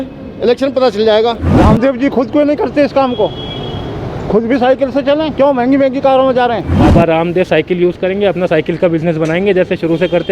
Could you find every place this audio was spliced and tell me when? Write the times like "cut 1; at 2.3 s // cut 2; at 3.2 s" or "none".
cut 1; at 1.6 s // cut 2; at 6.7 s

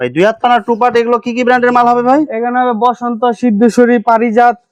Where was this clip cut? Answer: none

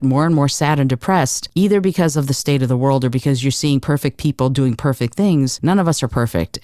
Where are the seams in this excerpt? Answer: cut 1; at 1.4 s // cut 2; at 5.6 s

